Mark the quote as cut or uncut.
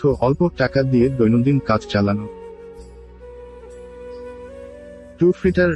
uncut